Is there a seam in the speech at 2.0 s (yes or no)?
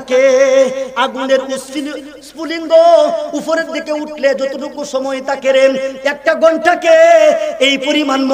yes